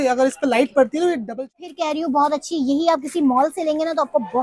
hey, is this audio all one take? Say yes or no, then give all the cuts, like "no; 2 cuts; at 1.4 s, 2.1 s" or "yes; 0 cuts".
no; 1 cut; at 1.5 s